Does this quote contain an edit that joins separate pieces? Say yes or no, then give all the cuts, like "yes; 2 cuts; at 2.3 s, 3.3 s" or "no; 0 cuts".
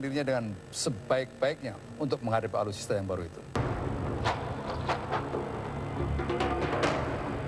no; 0 cuts